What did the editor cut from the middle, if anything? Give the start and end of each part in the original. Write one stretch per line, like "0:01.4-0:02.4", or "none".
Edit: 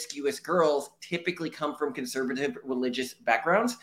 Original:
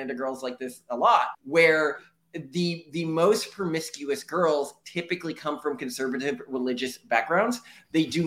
none